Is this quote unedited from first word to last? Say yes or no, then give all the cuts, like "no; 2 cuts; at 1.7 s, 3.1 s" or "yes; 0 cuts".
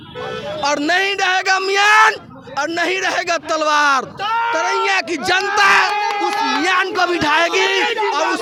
yes; 0 cuts